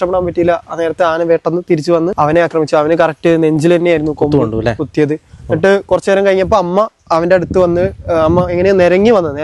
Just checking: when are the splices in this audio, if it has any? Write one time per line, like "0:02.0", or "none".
0:02.1